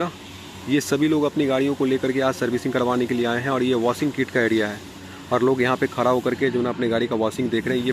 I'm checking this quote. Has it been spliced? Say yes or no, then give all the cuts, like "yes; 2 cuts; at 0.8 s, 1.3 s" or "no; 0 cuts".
no; 0 cuts